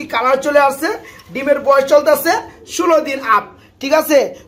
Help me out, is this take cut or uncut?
uncut